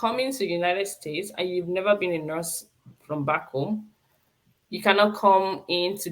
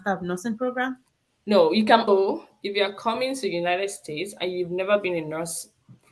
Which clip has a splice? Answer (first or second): second